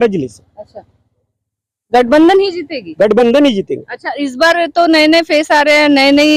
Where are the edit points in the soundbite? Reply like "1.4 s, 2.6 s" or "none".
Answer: none